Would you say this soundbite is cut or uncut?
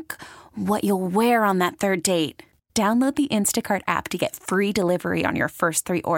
uncut